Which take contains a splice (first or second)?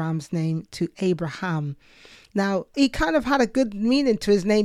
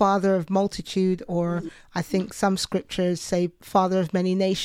first